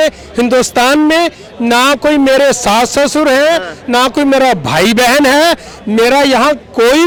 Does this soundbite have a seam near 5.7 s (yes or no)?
no